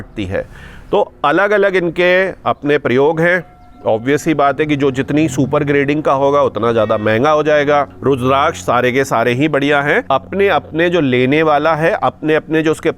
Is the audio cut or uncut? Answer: cut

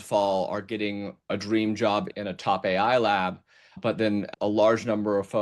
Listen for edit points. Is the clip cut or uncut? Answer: cut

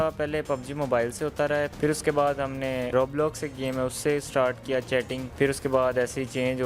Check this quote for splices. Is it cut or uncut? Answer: cut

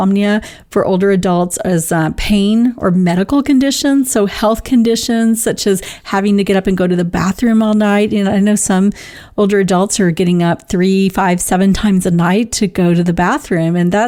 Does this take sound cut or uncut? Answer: uncut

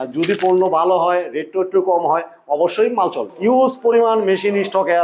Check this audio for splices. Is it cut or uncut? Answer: cut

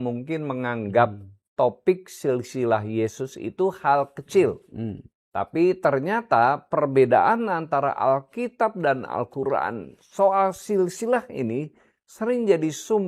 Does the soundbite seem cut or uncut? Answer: uncut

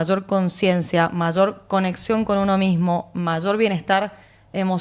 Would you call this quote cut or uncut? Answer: uncut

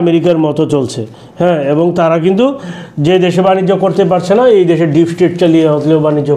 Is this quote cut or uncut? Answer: uncut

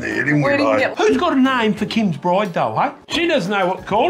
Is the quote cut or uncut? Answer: cut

